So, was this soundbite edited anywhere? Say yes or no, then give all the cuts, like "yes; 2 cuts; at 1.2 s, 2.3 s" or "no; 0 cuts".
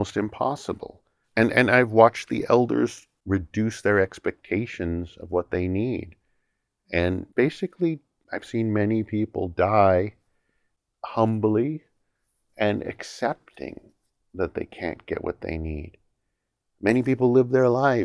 yes; 1 cut; at 1.2 s